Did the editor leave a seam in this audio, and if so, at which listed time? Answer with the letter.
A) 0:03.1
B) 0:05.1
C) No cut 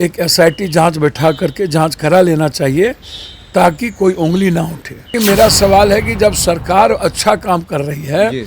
B